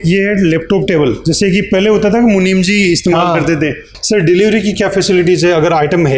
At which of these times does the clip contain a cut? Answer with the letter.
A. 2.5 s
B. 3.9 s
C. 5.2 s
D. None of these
B